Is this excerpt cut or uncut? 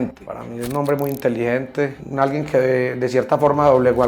uncut